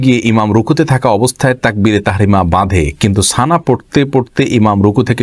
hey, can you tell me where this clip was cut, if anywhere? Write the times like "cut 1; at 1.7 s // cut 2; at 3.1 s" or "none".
none

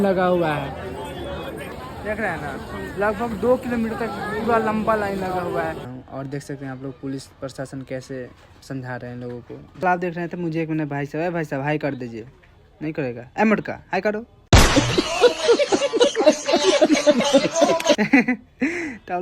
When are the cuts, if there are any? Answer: cut 1; at 1.7 s // cut 2; at 5.9 s // cut 3; at 9.8 s

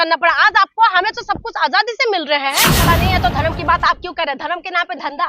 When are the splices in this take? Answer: cut 1; at 2.7 s

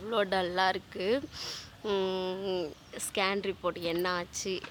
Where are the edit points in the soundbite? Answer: none

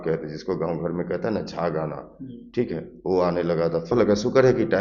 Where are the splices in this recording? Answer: cut 1; at 3.9 s

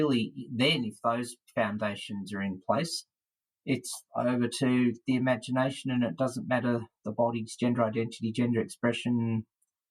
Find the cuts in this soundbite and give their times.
none

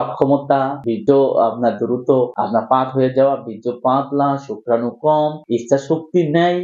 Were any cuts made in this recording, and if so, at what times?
cut 1; at 0.9 s // cut 2; at 2.4 s

